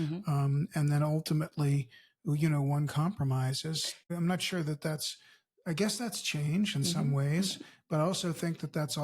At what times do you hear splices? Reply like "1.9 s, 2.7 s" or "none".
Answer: 4.1 s